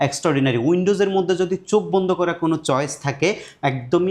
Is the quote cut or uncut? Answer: uncut